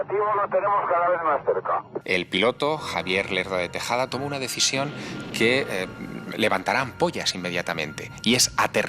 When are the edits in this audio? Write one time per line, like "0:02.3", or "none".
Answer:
0:01.9